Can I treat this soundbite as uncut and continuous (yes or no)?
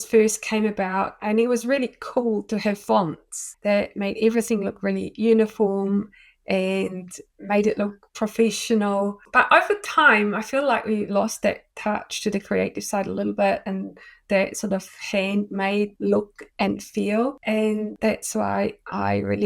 yes